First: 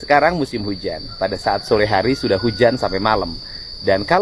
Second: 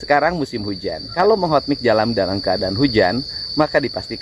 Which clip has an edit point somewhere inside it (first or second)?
second